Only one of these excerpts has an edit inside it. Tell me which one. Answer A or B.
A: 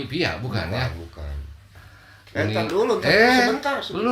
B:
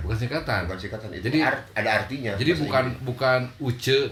A